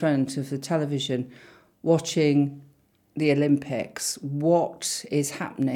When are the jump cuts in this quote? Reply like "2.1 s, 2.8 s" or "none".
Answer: none